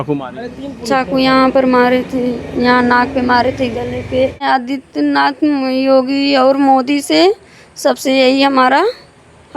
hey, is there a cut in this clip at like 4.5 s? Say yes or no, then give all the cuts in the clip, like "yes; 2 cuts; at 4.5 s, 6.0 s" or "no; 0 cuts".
yes; 1 cut; at 4.5 s